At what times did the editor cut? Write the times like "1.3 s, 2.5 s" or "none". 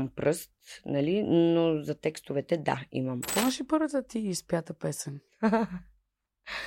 3.3 s